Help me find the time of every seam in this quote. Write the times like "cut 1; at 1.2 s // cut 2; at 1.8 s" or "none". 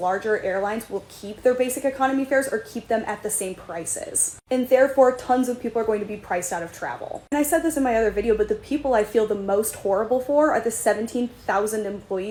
none